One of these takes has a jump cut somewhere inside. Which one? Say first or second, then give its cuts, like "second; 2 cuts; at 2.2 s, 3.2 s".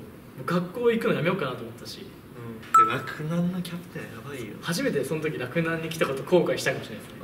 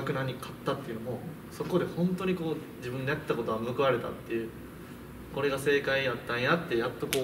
first; 1 cut; at 2.6 s